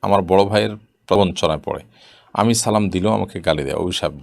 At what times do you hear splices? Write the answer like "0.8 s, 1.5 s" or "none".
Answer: 1.2 s